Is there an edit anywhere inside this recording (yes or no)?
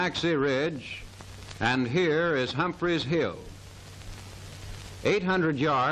no